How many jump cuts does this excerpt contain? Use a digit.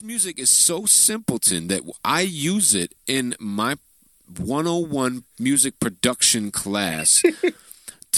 0